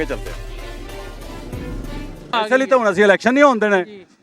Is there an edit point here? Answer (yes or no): yes